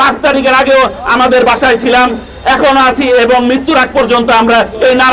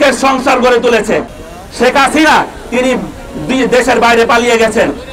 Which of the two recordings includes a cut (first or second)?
second